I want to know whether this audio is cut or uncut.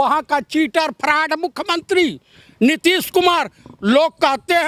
uncut